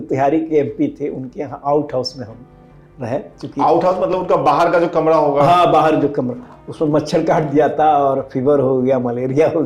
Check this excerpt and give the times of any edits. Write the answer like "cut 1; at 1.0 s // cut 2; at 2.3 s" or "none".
none